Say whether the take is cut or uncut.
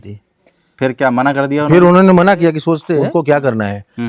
cut